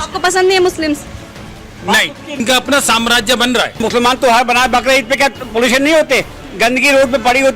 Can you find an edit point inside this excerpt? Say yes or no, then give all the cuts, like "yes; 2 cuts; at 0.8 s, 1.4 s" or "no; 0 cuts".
yes; 2 cuts; at 2.4 s, 3.8 s